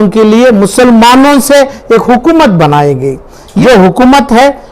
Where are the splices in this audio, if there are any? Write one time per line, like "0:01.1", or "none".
0:03.4